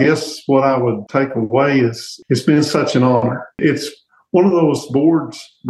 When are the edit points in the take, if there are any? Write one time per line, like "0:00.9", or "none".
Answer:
0:01.0
0:02.1
0:03.6

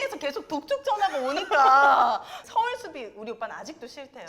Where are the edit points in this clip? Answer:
0:02.4

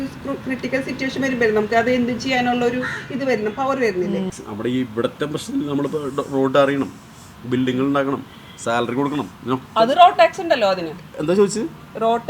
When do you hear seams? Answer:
0:04.3

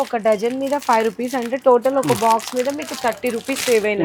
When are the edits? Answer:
none

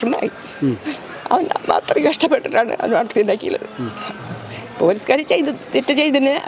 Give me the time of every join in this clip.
none

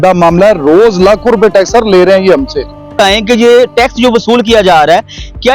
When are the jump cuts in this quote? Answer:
0:02.9

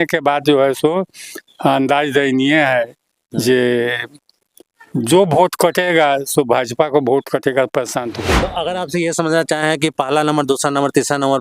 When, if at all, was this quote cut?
0:08.3

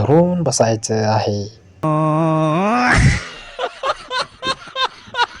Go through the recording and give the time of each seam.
0:01.8

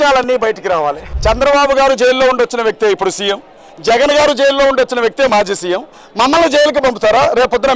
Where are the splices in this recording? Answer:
0:01.1

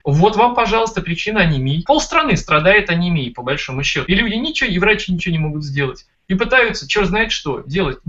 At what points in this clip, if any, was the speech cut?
0:04.0

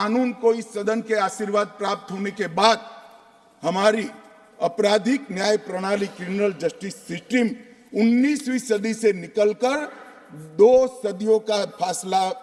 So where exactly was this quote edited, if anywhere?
none

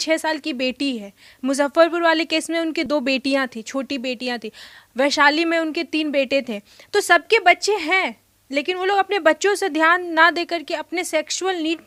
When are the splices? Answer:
none

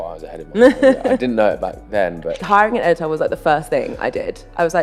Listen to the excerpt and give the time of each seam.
0:02.4

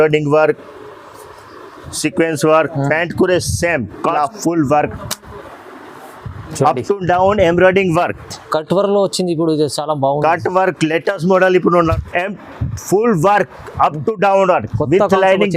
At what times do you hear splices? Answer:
0:04.2
0:12.0

